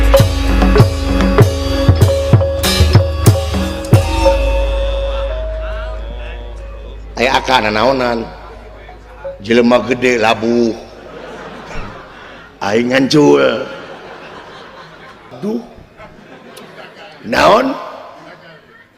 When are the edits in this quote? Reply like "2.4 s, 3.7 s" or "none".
15.3 s